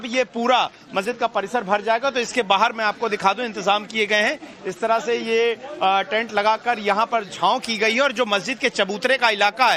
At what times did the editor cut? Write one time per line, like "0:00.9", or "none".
none